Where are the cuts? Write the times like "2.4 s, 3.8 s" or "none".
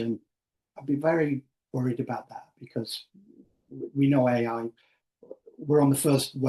none